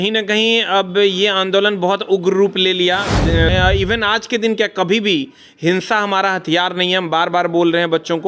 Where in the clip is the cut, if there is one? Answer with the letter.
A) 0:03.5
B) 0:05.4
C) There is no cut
A